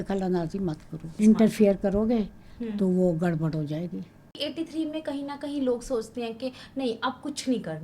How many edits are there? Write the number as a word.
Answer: two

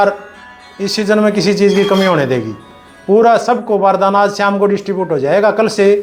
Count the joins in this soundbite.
zero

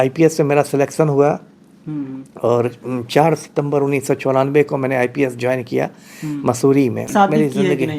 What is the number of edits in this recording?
one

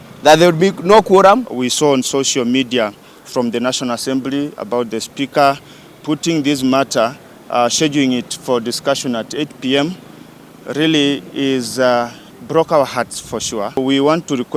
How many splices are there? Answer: two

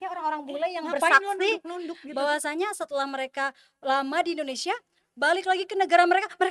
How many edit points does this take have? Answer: zero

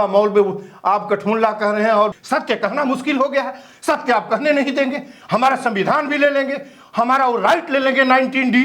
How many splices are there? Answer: one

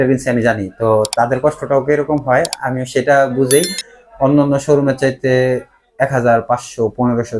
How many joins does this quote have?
zero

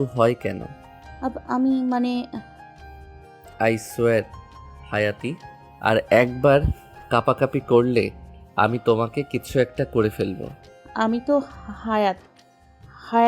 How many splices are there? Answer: one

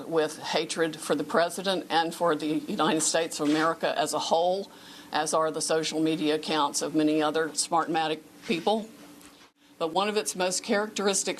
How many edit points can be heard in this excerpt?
one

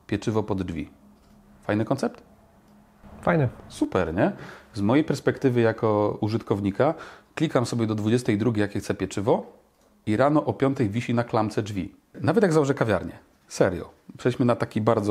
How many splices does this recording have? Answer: one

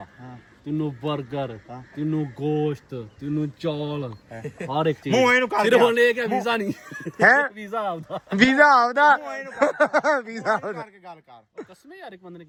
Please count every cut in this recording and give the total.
zero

